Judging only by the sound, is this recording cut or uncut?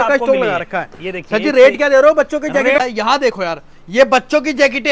cut